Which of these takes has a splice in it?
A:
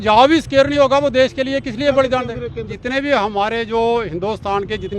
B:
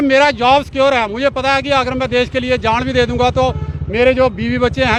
A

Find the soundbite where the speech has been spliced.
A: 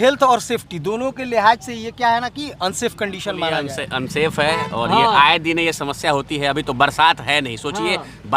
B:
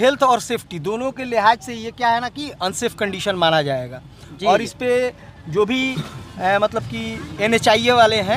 A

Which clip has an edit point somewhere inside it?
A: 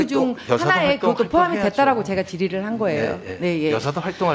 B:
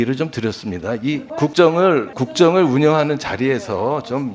B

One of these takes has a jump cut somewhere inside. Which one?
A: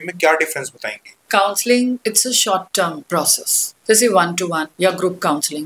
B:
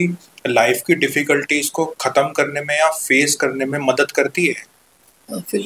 A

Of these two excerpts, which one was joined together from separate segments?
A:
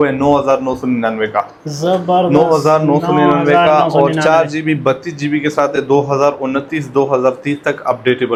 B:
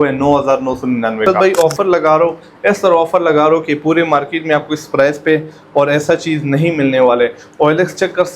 B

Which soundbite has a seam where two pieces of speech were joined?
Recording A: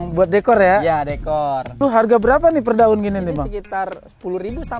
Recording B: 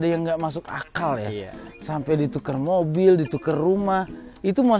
A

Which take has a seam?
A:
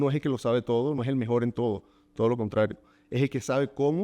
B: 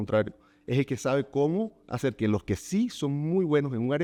A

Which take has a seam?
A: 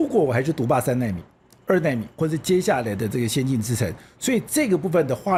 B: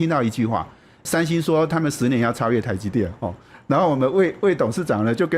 B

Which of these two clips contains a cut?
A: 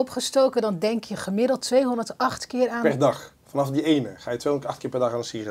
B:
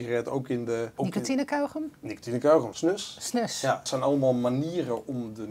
B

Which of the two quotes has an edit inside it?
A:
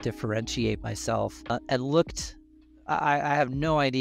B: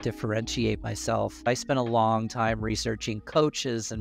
B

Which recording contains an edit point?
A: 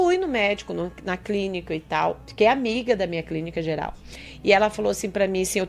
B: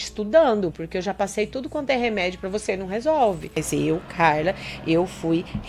B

